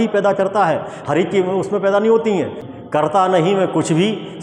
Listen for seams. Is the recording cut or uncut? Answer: cut